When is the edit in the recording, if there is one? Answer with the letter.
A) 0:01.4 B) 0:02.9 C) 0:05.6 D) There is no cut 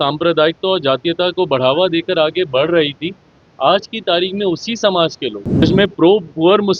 C